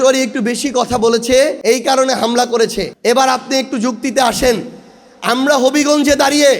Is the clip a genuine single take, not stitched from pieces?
no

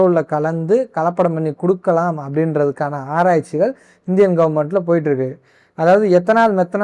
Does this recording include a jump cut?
no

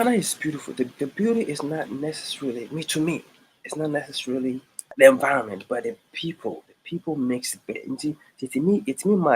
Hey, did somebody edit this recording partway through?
yes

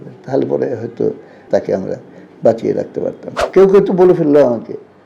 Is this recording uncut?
no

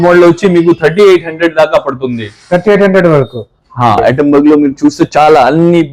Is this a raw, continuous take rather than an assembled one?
no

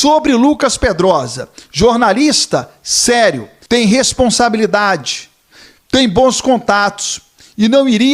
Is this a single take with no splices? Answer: no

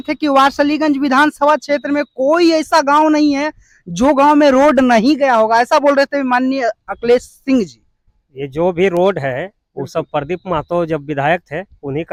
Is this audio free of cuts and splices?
yes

